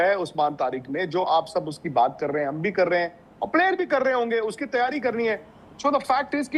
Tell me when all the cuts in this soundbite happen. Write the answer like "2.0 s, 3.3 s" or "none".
none